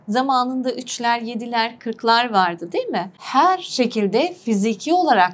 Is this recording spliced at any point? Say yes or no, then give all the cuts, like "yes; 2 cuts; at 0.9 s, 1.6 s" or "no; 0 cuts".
yes; 1 cut; at 3.2 s